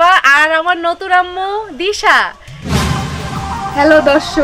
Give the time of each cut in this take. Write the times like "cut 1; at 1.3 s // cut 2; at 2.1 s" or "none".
cut 1; at 2.8 s